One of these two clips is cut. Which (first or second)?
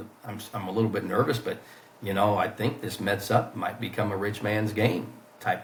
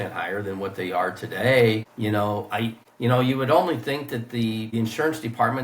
second